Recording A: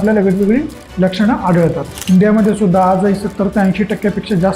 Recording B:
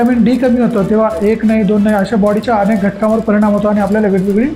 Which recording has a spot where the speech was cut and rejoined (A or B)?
A